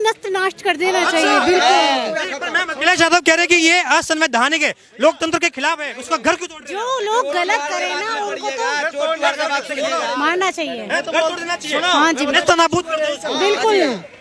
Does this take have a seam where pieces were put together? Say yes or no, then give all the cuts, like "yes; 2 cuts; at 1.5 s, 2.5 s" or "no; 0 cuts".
no; 0 cuts